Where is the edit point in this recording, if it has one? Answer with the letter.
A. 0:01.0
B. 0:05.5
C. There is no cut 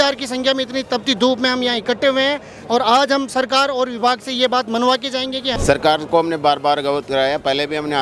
B